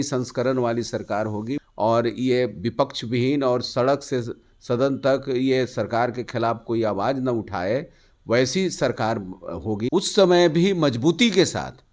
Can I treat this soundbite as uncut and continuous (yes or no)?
no